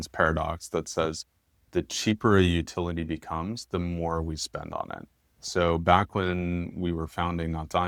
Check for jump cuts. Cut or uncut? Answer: uncut